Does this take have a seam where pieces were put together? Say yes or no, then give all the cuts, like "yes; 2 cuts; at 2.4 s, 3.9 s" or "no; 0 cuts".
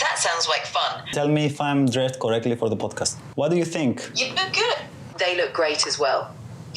yes; 3 cuts; at 1.1 s, 3.2 s, 5.0 s